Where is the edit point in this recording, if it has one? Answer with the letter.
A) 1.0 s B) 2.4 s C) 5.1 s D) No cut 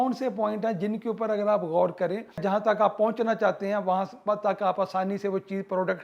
B